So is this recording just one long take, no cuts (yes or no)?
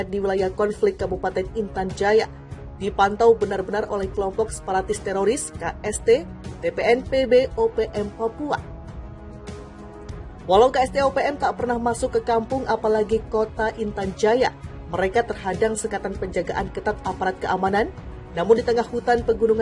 yes